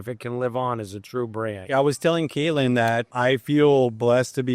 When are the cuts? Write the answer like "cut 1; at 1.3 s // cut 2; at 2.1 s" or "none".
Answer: cut 1; at 1.7 s // cut 2; at 3.1 s